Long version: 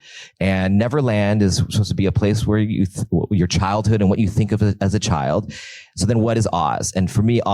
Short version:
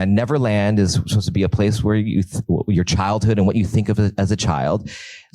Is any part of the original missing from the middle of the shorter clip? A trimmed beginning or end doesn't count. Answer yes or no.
no